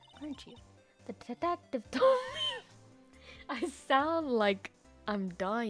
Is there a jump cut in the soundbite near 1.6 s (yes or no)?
no